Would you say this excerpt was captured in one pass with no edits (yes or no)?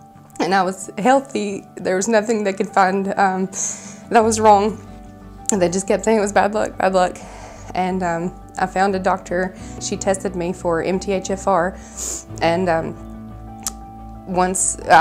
yes